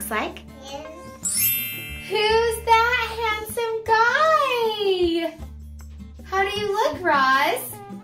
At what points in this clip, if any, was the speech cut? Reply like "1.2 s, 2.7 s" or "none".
1.2 s